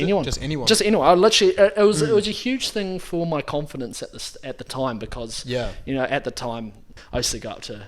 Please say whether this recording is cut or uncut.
cut